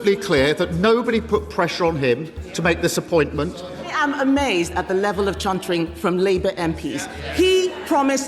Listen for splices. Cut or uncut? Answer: cut